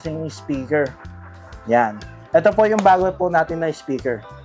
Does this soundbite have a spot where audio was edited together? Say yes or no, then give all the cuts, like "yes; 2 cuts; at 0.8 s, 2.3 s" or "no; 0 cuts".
no; 0 cuts